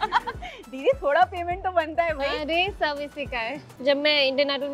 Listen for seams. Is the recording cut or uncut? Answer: cut